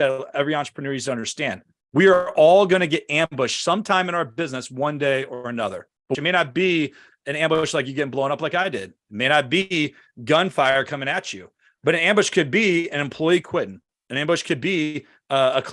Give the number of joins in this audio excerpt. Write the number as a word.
one